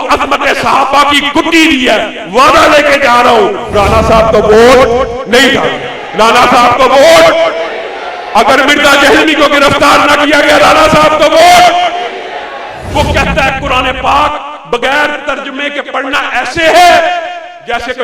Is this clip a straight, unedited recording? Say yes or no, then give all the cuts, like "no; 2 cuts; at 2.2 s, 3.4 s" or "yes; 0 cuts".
no; 2 cuts; at 3.7 s, 12.8 s